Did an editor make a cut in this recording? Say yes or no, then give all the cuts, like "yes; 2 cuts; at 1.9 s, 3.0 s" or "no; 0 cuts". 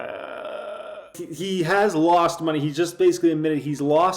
yes; 1 cut; at 1.2 s